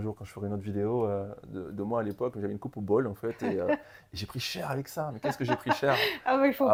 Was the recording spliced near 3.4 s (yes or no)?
no